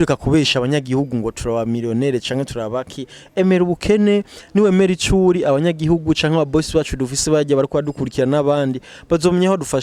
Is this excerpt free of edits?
yes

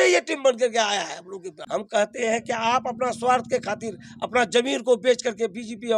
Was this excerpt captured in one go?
no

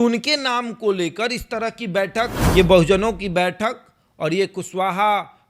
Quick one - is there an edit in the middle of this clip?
yes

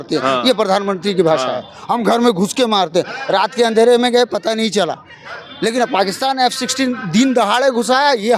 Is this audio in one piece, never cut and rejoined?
yes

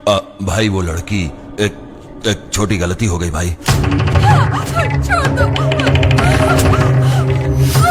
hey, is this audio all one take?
yes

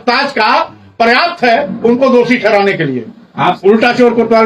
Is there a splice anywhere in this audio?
yes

